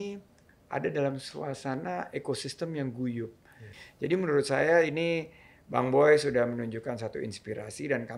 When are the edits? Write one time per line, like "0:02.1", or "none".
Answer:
0:03.7